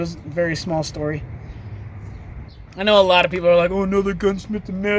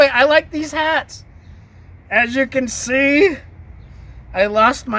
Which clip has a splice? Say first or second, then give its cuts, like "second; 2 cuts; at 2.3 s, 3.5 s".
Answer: first; 1 cut; at 2.5 s